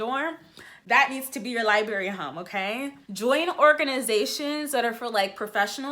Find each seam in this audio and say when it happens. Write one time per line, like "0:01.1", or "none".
0:03.0